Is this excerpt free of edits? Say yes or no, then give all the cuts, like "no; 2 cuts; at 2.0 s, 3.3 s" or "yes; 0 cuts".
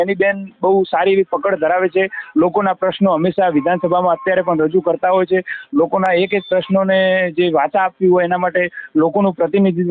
yes; 0 cuts